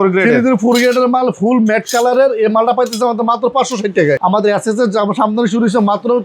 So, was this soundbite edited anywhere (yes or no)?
yes